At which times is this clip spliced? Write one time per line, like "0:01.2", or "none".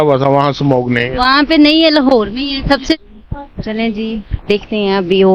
0:03.0